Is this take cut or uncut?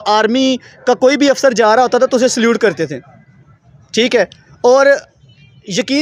uncut